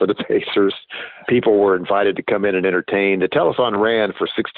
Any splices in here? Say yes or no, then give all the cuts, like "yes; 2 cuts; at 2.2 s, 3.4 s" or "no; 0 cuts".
yes; 1 cut; at 1.1 s